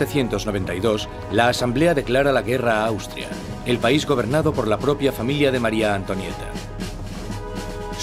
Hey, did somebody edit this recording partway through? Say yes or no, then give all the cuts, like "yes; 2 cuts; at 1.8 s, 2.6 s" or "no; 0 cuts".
no; 0 cuts